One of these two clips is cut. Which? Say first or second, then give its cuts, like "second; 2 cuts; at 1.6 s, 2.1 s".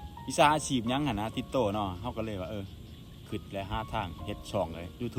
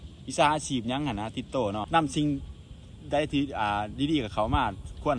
second; 1 cut; at 1.9 s